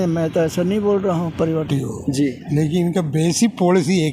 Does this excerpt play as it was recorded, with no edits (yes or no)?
no